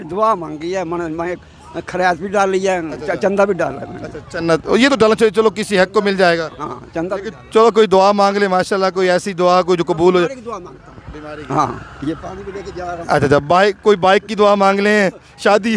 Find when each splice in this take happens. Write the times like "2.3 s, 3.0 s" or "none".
none